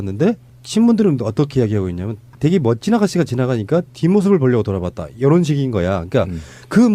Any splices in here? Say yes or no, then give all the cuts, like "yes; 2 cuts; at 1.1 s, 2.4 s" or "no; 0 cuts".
yes; 1 cut; at 2.0 s